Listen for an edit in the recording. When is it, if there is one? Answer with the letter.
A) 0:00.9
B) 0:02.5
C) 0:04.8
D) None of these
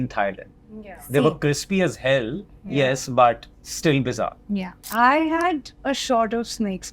C